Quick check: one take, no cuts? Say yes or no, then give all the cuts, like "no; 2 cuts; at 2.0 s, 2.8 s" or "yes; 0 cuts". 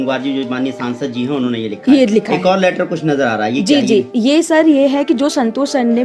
yes; 0 cuts